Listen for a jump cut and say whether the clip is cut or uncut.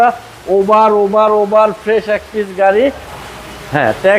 cut